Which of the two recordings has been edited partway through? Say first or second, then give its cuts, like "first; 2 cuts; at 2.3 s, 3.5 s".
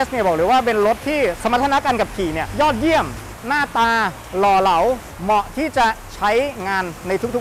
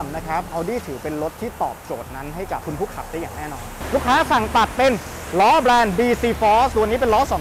second; 1 cut; at 3.7 s